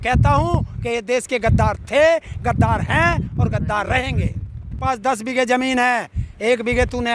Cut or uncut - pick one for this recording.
cut